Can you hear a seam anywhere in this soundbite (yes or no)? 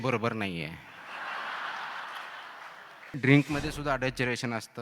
yes